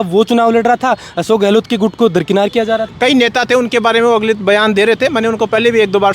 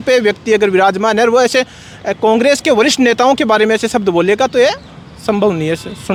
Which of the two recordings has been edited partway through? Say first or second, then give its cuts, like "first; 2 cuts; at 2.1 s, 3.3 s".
first; 1 cut; at 2.9 s